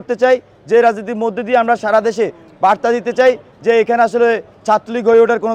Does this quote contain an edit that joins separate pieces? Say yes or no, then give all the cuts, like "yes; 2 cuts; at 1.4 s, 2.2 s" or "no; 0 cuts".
no; 0 cuts